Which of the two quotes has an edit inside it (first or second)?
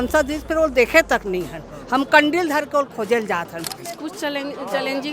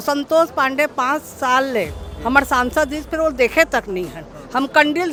first